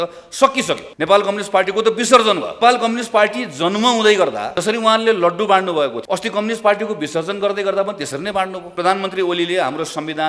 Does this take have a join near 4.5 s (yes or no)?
yes